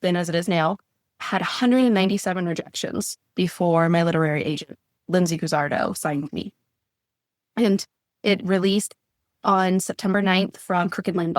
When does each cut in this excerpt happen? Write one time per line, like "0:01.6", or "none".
0:08.2